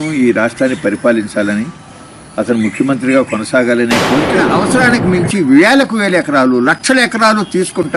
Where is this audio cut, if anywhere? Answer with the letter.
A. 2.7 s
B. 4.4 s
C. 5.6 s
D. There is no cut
B